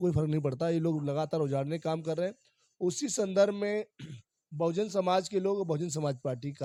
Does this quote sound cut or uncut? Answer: uncut